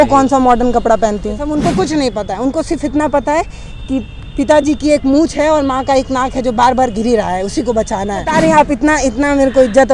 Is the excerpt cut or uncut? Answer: cut